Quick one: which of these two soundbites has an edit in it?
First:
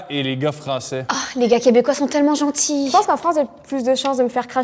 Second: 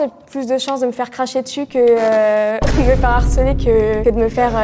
first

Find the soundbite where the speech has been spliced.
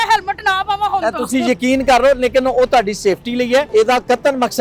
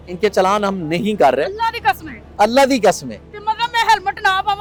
first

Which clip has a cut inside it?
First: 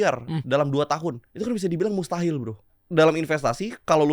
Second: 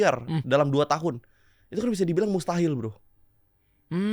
first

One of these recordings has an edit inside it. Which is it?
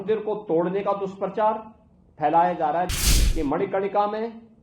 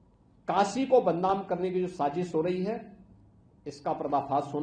first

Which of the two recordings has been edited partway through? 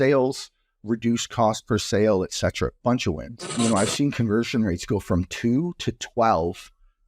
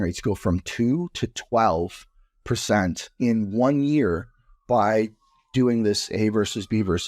first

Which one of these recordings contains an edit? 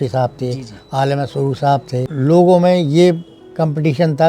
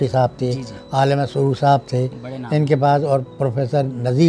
first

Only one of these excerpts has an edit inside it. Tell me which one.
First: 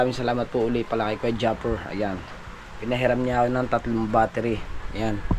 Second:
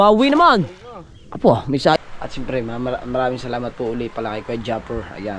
second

